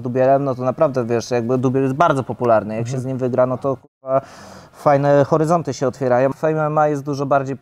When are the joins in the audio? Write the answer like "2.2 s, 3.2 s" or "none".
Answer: 6.3 s